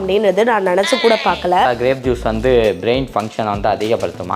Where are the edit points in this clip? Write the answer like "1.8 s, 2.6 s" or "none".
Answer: 1.7 s